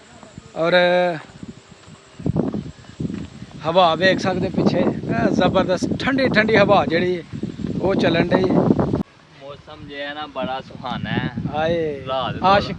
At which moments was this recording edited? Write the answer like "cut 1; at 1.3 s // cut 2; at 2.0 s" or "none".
cut 1; at 9.0 s